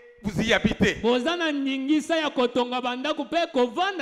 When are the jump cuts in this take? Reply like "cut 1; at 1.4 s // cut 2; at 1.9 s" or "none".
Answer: none